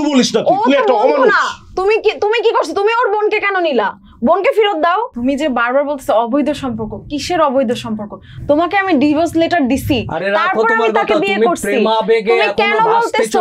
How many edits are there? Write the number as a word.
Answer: one